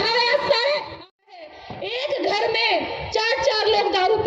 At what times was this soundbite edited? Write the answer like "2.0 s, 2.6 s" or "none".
1.1 s